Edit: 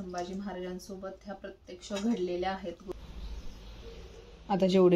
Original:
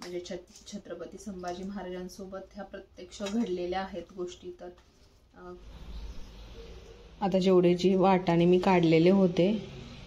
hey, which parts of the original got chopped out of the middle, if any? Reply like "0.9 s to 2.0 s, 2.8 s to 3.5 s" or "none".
4.2 s to 5.6 s